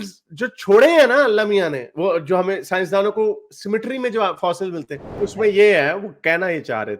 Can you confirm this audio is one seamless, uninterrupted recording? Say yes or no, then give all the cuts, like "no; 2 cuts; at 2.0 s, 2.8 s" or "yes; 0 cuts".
no; 1 cut; at 5.1 s